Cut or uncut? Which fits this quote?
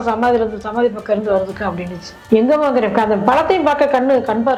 uncut